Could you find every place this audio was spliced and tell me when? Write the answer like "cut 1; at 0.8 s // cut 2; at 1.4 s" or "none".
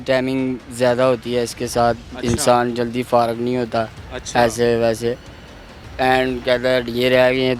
none